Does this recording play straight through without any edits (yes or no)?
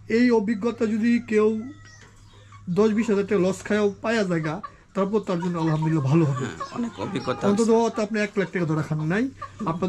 yes